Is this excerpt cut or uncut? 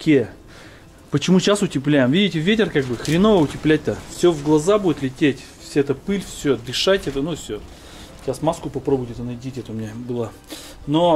uncut